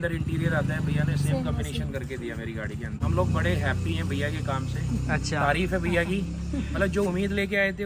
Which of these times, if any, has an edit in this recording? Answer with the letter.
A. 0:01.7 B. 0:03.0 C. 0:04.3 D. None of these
B